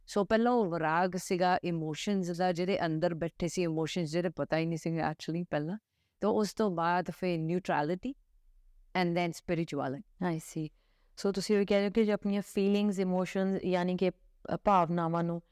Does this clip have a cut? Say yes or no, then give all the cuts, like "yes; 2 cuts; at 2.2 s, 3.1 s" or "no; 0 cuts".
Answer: no; 0 cuts